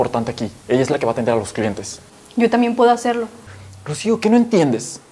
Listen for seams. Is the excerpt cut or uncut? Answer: uncut